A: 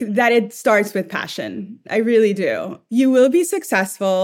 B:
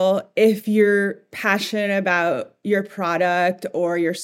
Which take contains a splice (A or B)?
A